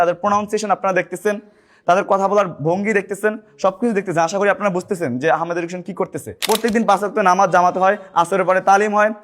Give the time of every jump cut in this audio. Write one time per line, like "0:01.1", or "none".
0:06.3